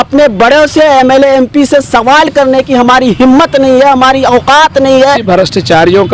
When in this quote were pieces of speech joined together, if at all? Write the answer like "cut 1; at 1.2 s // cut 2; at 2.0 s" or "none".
cut 1; at 5.2 s